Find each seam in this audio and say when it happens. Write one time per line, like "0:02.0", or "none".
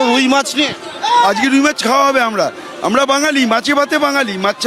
none